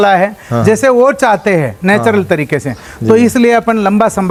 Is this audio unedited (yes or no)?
yes